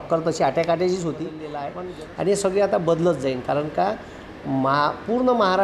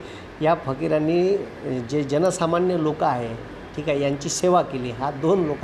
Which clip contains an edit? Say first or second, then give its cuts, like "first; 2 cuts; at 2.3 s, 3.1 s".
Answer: first; 1 cut; at 1.6 s